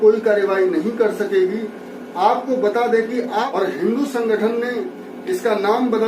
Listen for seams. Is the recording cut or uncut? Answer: cut